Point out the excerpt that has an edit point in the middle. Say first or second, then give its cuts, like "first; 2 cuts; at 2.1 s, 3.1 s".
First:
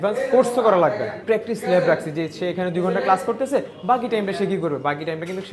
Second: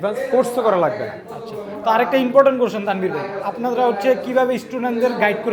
first; 1 cut; at 1.2 s